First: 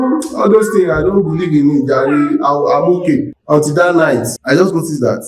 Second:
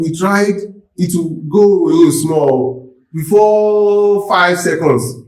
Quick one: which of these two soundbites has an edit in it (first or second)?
first